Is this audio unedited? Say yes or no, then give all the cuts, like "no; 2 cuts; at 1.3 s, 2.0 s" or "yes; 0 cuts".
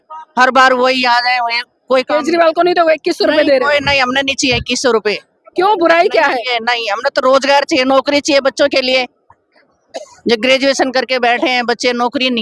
yes; 0 cuts